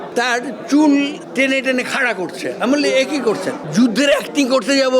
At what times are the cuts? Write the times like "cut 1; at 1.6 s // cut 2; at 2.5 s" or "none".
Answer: cut 1; at 3.6 s